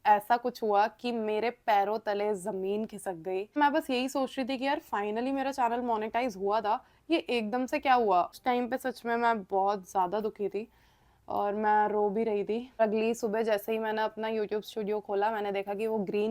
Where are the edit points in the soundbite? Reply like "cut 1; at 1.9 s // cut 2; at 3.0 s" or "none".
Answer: cut 1; at 3.6 s // cut 2; at 8.4 s // cut 3; at 12.8 s

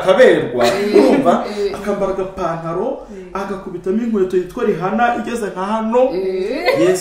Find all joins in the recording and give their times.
none

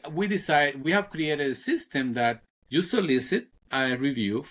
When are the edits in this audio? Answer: cut 1; at 0.8 s // cut 2; at 2.5 s // cut 3; at 3.6 s

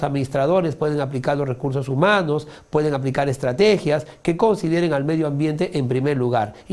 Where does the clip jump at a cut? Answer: none

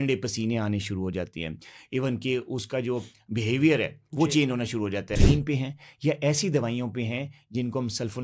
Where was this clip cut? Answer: cut 1; at 5.1 s

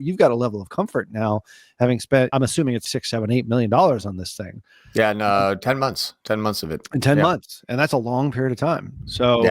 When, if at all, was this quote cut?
cut 1; at 2.9 s

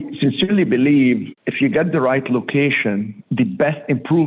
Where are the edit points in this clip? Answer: cut 1; at 1.4 s // cut 2; at 3.2 s

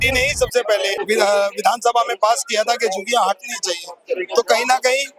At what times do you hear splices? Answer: cut 1; at 1.0 s

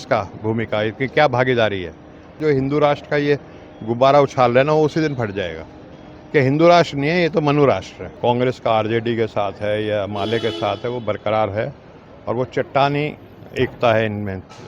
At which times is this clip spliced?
cut 1; at 2.4 s // cut 2; at 8.0 s

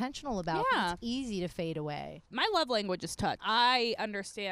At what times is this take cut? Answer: cut 1; at 2.3 s // cut 2; at 3.4 s

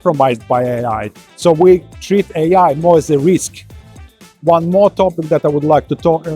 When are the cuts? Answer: cut 1; at 4.0 s

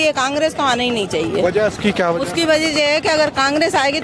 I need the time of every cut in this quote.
none

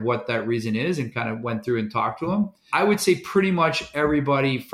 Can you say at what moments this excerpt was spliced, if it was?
cut 1; at 2.7 s

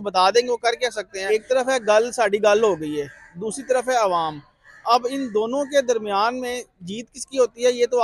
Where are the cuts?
cut 1; at 1.1 s

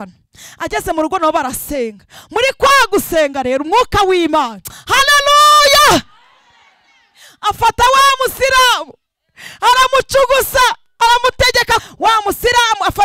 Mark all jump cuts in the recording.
cut 1; at 11.8 s

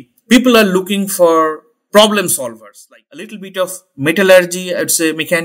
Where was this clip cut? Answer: cut 1; at 2.4 s

